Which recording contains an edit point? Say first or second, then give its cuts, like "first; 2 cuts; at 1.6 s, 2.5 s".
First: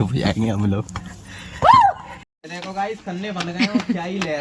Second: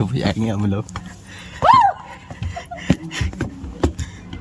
first; 1 cut; at 2.4 s